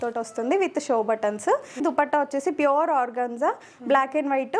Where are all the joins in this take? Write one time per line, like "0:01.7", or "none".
0:01.8